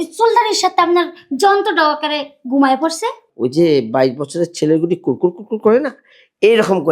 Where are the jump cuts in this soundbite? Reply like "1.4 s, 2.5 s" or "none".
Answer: 3.2 s